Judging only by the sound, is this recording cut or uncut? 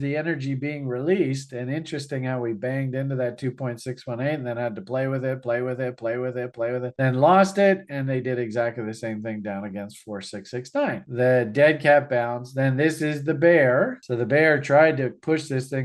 cut